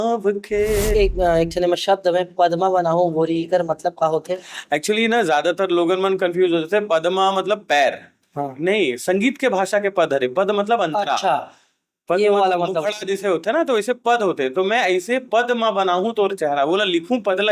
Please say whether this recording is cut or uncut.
cut